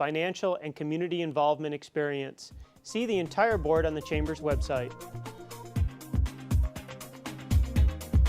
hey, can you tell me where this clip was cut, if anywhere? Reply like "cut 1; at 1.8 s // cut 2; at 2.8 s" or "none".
cut 1; at 5.0 s